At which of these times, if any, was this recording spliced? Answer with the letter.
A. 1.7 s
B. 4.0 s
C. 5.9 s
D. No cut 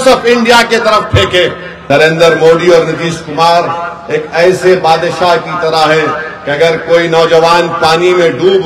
A